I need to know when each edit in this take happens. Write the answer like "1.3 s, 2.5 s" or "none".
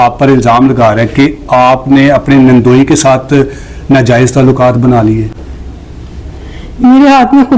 none